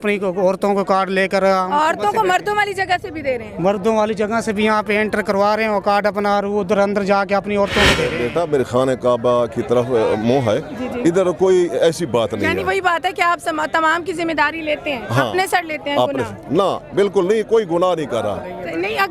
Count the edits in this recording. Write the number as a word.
one